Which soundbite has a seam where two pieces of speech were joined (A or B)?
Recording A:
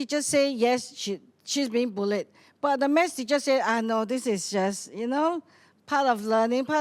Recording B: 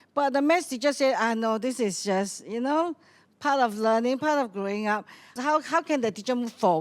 B